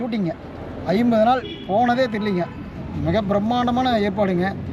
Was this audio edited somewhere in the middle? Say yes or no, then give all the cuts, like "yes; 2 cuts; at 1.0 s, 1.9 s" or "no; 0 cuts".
no; 0 cuts